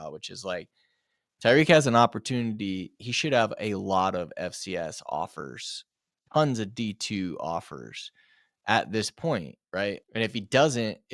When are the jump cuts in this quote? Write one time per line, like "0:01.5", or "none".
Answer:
0:03.0
0:10.0